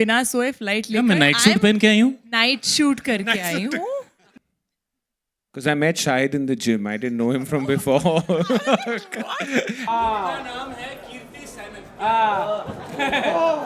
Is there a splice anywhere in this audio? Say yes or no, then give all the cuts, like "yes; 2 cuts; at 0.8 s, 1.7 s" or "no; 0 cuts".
yes; 2 cuts; at 4.3 s, 9.9 s